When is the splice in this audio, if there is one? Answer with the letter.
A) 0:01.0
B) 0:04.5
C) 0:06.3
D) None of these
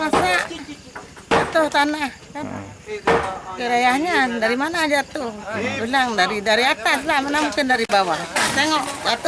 D